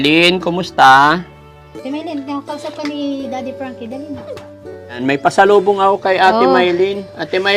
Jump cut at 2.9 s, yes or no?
no